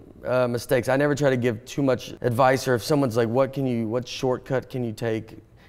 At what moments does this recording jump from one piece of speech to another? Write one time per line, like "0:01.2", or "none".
0:02.1